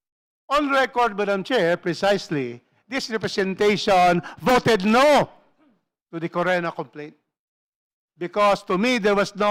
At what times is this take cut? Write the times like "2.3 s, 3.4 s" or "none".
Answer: none